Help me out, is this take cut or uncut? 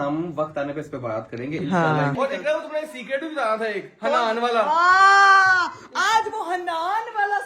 cut